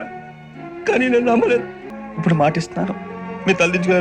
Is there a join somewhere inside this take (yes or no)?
yes